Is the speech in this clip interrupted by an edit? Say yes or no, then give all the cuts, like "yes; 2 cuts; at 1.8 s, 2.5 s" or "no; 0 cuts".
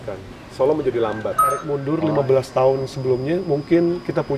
yes; 1 cut; at 1.8 s